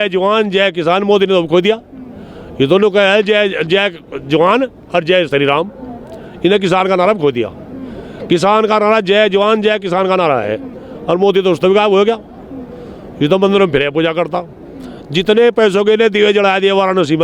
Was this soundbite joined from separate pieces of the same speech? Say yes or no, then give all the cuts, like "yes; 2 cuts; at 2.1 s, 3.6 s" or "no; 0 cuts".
no; 0 cuts